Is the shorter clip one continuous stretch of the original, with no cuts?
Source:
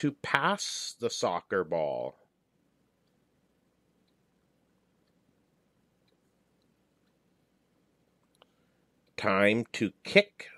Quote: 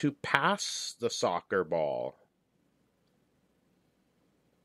no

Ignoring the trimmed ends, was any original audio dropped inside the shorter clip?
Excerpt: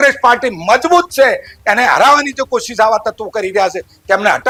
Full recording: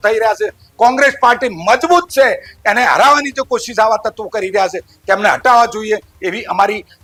no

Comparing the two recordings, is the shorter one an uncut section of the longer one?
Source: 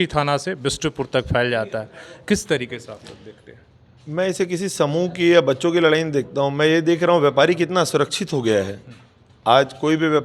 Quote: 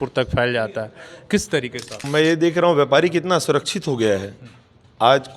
no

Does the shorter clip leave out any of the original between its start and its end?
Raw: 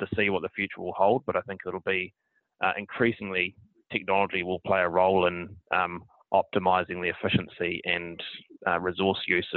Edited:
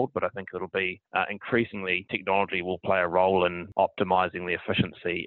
yes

